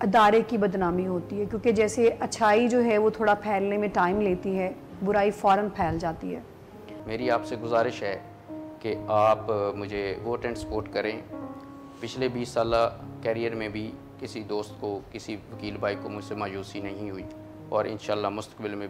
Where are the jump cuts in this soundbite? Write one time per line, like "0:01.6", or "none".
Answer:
0:07.0